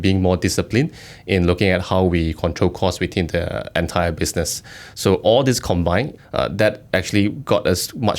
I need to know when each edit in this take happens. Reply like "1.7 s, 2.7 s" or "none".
6.2 s